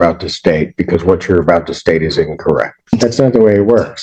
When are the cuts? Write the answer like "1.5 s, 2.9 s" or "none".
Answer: 2.9 s